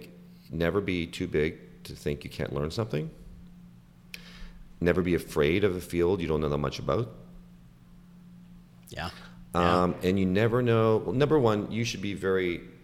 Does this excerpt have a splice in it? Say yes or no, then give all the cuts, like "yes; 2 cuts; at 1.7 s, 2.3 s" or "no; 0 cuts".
no; 0 cuts